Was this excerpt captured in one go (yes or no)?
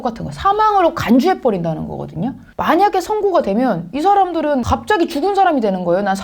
no